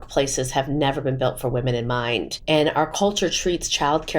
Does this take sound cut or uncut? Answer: cut